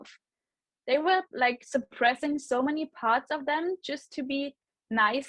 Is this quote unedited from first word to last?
yes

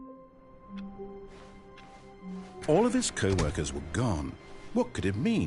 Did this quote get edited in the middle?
yes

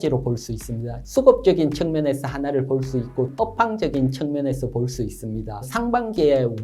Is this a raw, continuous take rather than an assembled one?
no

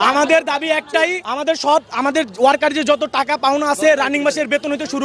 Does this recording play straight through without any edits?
no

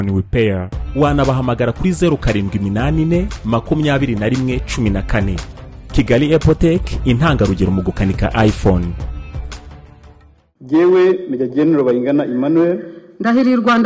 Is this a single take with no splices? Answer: no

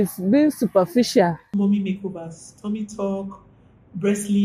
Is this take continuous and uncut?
no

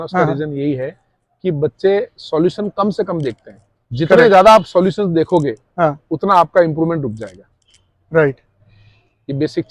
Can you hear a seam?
no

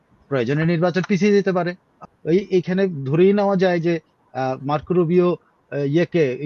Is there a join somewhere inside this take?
yes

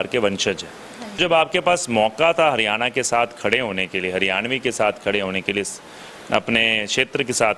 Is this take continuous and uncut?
no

